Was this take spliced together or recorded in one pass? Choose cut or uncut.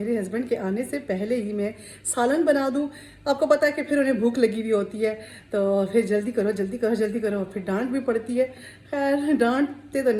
uncut